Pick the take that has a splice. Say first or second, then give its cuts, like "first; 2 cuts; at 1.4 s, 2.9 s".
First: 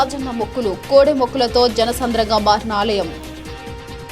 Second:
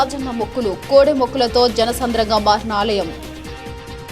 second; 1 cut; at 3.2 s